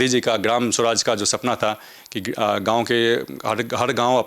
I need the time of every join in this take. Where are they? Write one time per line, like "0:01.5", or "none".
none